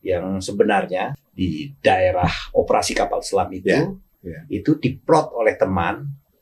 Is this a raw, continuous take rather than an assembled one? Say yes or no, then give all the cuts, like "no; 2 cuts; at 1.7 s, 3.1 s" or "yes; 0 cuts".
no; 1 cut; at 1.2 s